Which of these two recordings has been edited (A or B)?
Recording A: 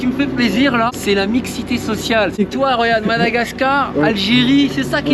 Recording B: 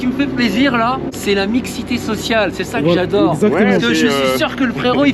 A